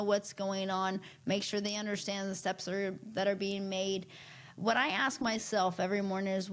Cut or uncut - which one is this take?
uncut